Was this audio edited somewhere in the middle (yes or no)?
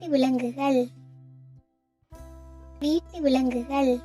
yes